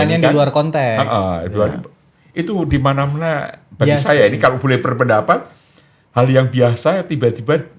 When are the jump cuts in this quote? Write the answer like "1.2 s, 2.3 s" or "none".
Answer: none